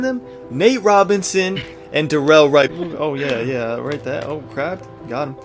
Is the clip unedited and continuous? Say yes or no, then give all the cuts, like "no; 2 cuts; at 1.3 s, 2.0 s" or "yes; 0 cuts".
no; 1 cut; at 2.7 s